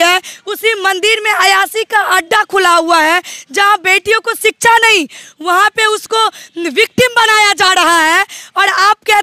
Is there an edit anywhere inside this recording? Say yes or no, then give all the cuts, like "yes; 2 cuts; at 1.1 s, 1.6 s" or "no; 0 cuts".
no; 0 cuts